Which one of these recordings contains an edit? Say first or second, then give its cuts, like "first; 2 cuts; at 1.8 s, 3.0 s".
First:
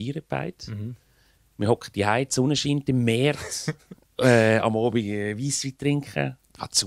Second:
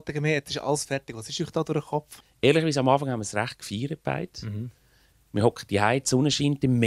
second; 1 cut; at 2.2 s